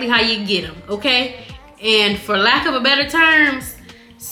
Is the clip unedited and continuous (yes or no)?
yes